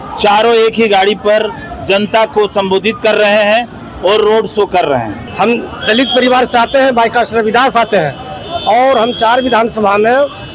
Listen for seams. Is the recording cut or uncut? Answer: cut